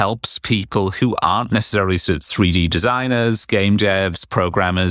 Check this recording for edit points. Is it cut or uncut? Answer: uncut